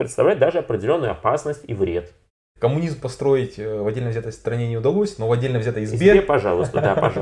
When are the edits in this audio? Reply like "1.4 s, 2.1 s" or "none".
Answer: 2.5 s